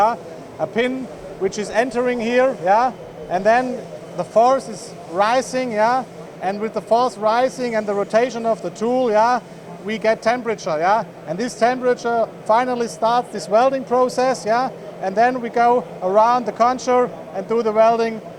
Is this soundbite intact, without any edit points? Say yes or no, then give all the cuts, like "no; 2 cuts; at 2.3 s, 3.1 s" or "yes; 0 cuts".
yes; 0 cuts